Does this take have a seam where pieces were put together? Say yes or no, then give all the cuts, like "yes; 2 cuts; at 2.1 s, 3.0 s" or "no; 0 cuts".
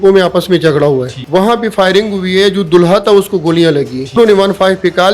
yes; 2 cuts; at 1.2 s, 4.2 s